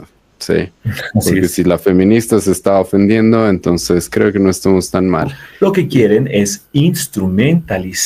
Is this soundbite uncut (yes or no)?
no